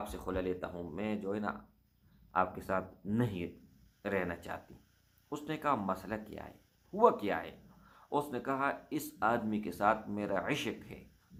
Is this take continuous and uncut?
yes; 0 cuts

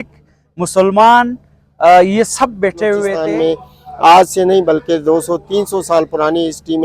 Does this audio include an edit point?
yes; 1 cut; at 3.2 s

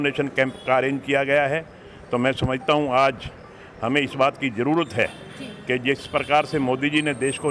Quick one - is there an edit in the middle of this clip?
no; 0 cuts

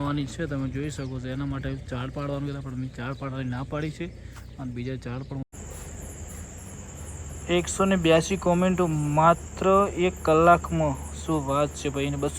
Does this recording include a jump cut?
yes; 1 cut; at 5.5 s

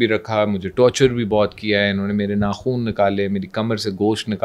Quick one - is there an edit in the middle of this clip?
no; 0 cuts

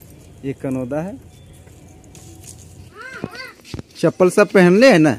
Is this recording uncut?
no; 1 cut; at 2.9 s

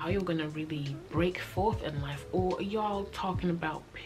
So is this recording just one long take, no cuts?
yes; 0 cuts

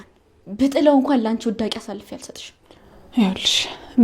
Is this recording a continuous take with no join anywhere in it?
yes; 0 cuts

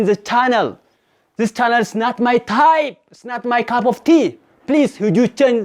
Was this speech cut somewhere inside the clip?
no; 0 cuts

